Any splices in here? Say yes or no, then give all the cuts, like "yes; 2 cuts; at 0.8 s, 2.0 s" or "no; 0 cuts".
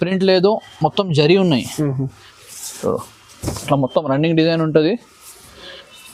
no; 0 cuts